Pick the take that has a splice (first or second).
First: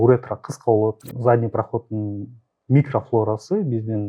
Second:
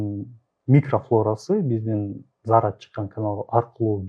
first